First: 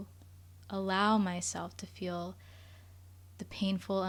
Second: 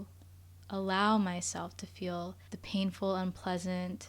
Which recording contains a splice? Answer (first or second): second